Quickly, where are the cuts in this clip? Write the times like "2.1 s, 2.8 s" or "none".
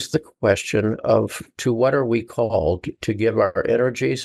none